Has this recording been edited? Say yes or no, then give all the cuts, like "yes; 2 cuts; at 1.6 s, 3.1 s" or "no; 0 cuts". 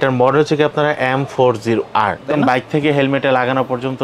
yes; 1 cut; at 2.3 s